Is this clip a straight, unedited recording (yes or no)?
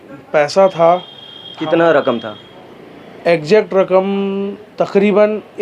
yes